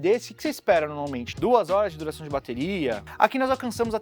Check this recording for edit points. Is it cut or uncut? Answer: cut